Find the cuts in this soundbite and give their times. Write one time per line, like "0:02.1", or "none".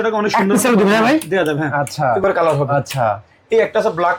0:02.2